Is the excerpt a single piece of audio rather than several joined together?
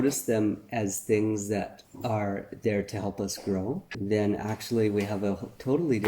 no; 2 cuts; at 1.8 s, 3.9 s

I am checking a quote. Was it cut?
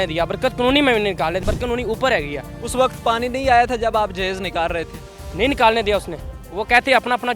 yes; 1 cut; at 1.4 s

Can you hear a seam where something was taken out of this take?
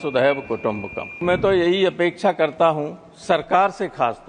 yes; 1 cut; at 1.2 s

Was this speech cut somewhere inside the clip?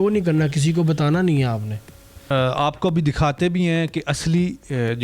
yes; 1 cut; at 2.2 s

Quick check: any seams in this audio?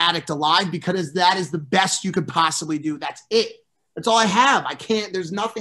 no; 0 cuts

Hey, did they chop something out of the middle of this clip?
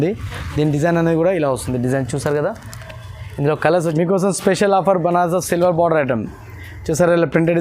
yes; 1 cut; at 3.8 s

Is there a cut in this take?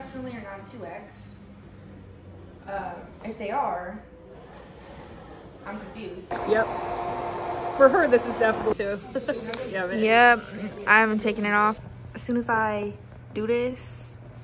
yes; 2 cuts; at 6.3 s, 11.8 s

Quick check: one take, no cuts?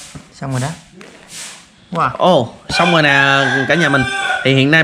yes; 0 cuts

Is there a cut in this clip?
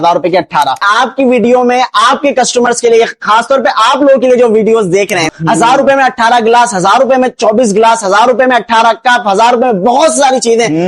yes; 2 cuts; at 0.8 s, 5.3 s

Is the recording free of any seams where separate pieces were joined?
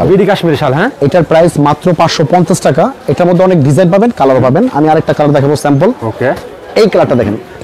yes; 0 cuts

